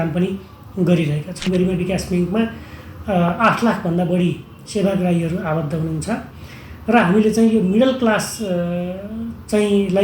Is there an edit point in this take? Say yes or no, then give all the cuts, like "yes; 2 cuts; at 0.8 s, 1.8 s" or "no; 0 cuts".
yes; 1 cut; at 1.5 s